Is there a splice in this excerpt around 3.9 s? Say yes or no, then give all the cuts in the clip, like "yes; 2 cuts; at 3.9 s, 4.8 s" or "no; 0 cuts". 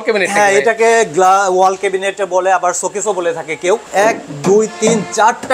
yes; 1 cut; at 3.9 s